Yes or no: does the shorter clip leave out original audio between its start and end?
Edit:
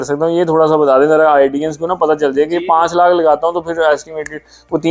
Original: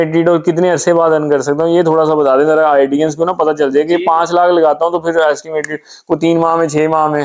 no